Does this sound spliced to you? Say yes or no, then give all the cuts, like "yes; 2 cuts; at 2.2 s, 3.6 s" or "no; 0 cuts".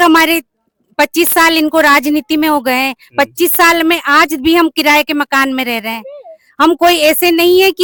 no; 0 cuts